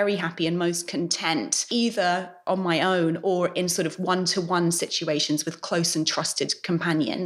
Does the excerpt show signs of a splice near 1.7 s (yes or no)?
yes